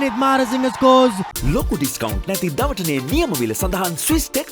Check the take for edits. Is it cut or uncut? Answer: cut